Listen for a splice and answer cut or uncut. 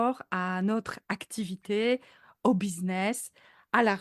uncut